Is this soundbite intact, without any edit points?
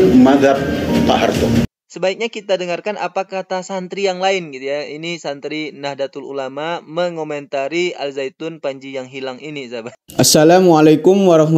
no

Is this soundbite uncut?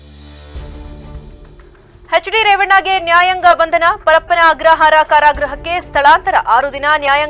no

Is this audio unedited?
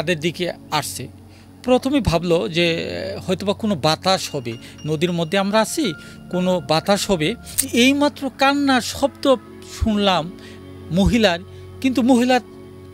no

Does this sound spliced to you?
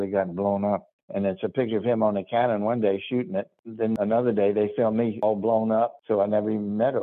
yes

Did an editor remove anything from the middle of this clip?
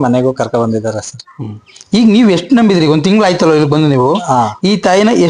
no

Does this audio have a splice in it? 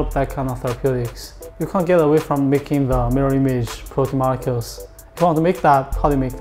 yes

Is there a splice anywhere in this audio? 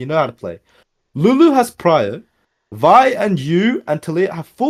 no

